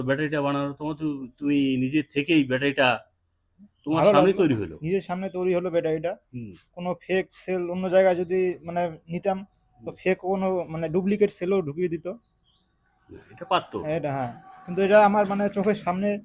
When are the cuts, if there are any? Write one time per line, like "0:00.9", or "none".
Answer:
none

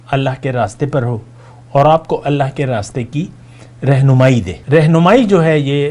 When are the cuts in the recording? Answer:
0:04.6

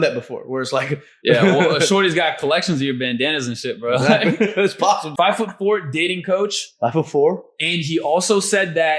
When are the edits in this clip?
0:05.1

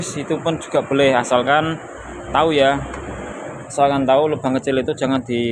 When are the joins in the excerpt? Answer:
none

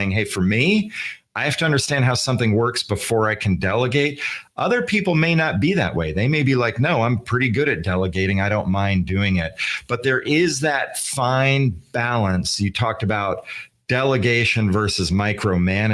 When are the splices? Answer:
none

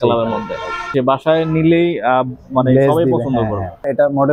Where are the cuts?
none

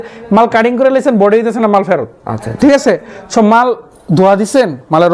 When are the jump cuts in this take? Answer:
none

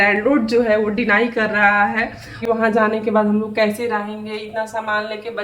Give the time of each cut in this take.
0:02.4

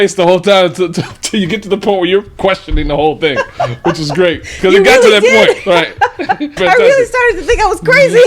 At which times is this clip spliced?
0:06.5

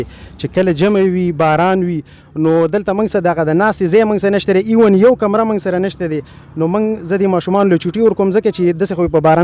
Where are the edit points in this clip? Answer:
none

